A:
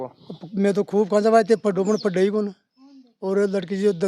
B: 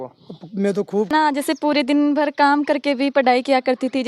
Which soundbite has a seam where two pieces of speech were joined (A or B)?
B